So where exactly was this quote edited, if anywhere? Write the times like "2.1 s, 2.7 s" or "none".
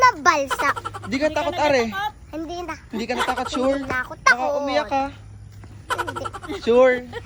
none